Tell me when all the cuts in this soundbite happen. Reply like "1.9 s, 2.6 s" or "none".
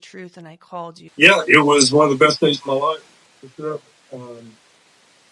1.0 s